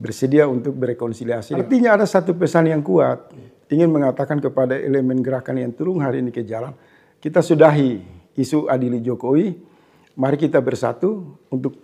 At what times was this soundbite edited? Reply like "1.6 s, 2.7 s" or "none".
1.6 s